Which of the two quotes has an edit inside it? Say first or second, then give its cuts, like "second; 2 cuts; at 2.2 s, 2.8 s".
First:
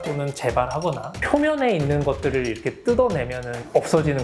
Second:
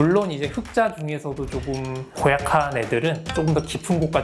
first; 1 cut; at 1.2 s